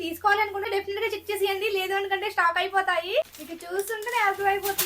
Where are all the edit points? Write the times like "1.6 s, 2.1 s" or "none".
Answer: 3.4 s